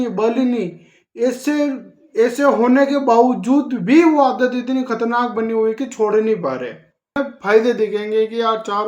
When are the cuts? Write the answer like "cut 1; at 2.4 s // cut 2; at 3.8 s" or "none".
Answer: cut 1; at 7.2 s